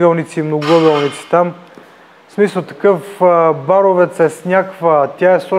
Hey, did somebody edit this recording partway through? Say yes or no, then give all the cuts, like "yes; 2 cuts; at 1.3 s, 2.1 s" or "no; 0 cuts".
no; 0 cuts